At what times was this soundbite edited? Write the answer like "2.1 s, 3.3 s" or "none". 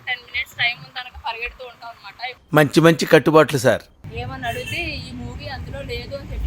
4.0 s